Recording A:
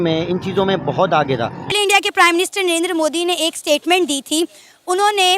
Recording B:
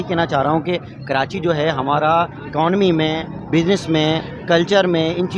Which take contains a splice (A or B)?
A